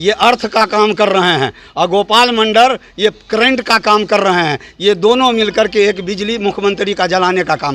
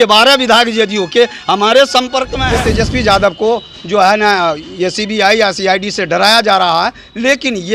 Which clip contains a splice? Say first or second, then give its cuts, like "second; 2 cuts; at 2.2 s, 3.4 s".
second; 1 cut; at 2.4 s